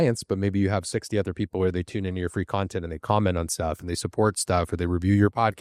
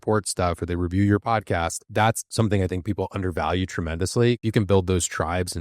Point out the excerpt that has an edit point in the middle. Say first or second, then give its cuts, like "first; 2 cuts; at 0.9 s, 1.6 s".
second; 1 cut; at 4.4 s